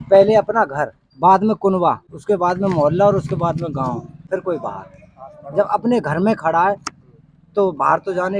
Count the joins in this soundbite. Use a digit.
3